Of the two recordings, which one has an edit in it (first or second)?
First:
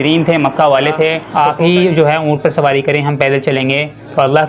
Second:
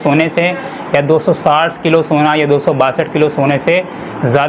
first